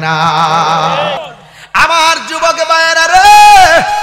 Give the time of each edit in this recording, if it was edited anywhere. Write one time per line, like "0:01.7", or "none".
0:01.2